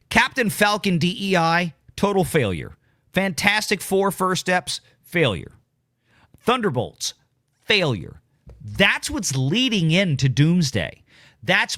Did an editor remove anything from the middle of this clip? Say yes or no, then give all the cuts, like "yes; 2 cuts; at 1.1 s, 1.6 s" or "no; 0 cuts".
no; 0 cuts